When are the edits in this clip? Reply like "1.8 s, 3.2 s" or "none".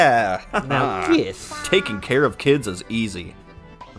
none